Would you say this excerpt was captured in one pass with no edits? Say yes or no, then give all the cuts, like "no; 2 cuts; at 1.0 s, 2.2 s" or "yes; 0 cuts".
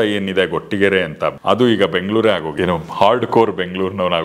no; 2 cuts; at 1.4 s, 2.5 s